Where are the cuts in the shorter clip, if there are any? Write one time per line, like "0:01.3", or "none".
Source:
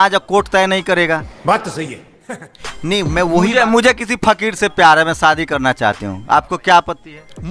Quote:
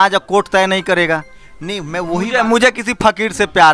0:01.3